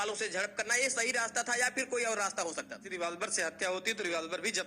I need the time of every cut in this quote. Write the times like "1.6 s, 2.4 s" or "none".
2.8 s

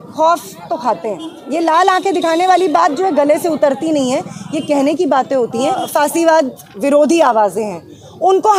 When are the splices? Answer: 1.3 s, 5.9 s

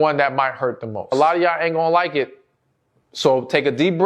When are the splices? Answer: 1.1 s

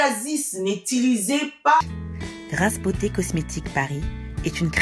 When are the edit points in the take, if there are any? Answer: 1.8 s

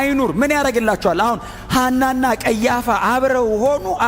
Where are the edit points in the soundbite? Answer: none

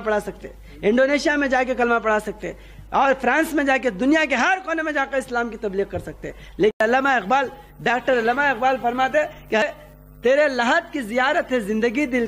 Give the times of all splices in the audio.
6.8 s, 9.6 s

